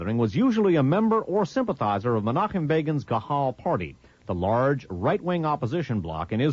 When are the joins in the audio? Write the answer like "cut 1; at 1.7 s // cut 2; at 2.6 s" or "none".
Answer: none